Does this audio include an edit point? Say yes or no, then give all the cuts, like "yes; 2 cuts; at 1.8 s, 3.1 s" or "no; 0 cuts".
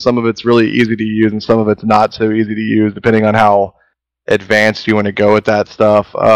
no; 0 cuts